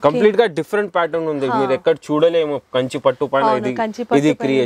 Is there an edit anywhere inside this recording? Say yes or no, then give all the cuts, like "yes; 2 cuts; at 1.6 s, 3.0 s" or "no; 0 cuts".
no; 0 cuts